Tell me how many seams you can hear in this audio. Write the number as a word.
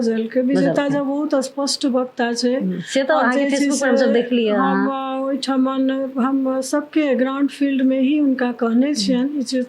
zero